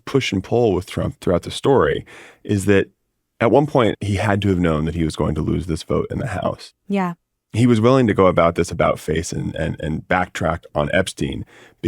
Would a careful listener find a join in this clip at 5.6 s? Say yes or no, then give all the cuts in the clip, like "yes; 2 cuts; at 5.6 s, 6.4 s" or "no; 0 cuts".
no; 2 cuts; at 1.2 s, 4.0 s